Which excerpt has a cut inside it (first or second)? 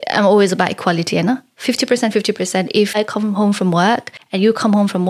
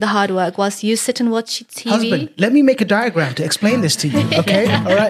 first